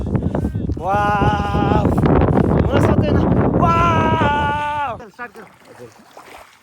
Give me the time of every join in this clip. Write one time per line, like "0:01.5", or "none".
0:05.0